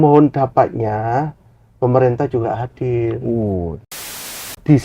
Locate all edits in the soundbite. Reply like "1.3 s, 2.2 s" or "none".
3.9 s